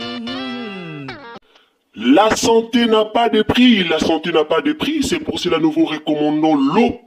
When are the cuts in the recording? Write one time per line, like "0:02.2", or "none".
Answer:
0:01.3